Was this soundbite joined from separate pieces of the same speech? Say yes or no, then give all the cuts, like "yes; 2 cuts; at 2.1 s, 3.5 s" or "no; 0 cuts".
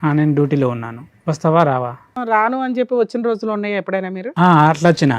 yes; 1 cut; at 2.2 s